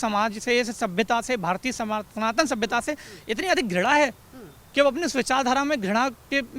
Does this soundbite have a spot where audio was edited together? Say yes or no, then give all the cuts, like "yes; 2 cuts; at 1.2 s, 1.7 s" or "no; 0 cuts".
no; 0 cuts